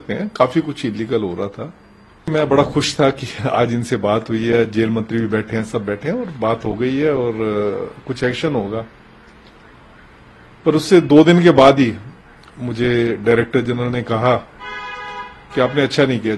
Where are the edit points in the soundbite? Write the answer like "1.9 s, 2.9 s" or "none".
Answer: 2.3 s

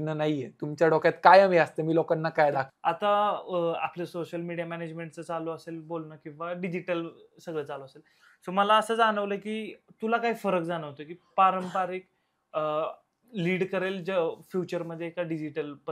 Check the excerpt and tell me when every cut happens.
2.7 s

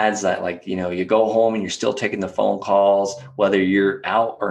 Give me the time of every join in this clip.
none

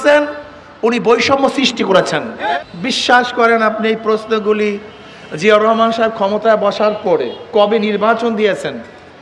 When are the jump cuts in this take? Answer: 2.6 s

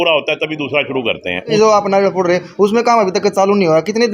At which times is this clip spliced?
1.5 s

